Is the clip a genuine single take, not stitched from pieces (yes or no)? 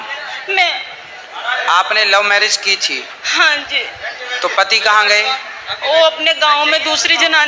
yes